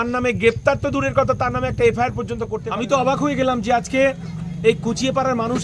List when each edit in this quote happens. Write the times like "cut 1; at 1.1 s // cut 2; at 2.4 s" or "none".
cut 1; at 2.6 s